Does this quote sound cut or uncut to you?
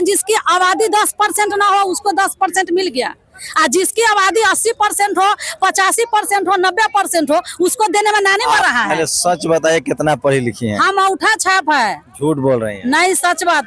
uncut